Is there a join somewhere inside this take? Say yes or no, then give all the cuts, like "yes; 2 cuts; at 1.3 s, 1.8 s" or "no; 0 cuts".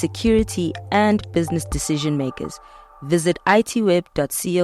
no; 0 cuts